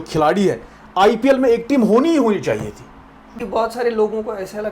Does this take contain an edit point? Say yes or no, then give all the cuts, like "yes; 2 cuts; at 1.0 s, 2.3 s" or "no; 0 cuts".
yes; 1 cut; at 3.4 s